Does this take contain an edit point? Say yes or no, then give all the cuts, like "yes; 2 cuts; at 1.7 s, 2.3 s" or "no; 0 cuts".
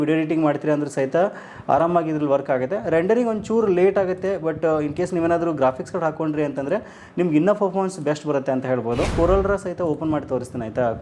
yes; 1 cut; at 9.1 s